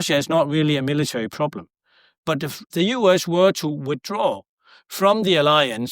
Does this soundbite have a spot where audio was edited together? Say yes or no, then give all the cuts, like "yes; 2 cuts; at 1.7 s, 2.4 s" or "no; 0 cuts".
yes; 1 cut; at 2.6 s